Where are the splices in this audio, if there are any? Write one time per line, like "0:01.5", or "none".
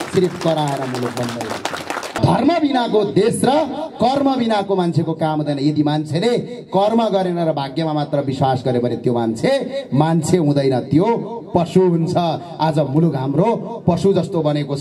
0:02.1